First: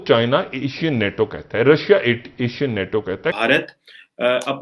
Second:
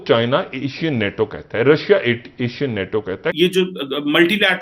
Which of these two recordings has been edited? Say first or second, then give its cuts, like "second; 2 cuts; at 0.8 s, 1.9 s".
second; 1 cut; at 3.3 s